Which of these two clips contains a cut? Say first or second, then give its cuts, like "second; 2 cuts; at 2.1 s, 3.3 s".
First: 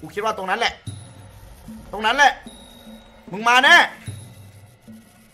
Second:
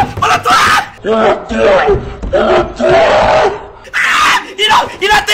second; 1 cut; at 0.9 s